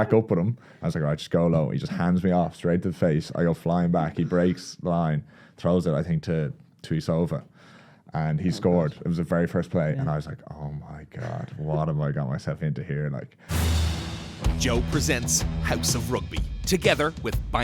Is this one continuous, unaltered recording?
no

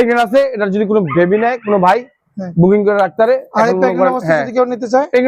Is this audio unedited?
yes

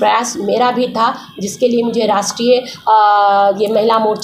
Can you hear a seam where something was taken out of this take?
no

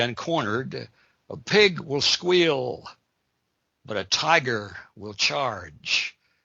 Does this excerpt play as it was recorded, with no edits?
yes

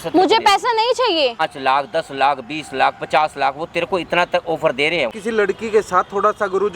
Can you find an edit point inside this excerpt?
yes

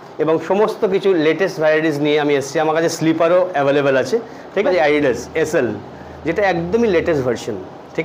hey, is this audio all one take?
no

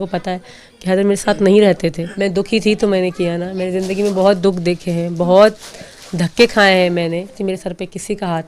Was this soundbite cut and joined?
yes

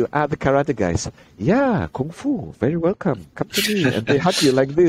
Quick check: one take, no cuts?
yes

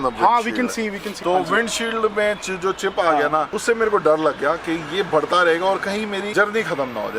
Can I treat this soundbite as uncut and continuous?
no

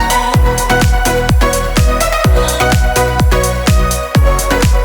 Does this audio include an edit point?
no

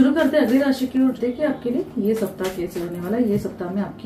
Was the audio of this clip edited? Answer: yes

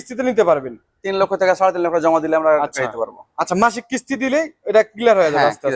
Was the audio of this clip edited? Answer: no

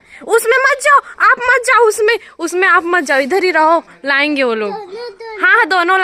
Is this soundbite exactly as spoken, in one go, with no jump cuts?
yes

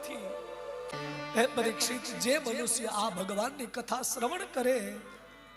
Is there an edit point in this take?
yes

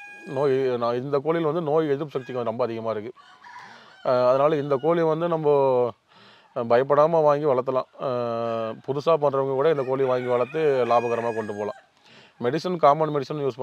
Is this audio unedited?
yes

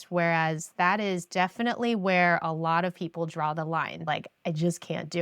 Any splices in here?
yes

